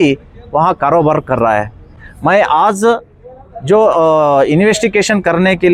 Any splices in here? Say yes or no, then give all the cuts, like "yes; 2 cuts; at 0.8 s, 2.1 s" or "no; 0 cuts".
no; 0 cuts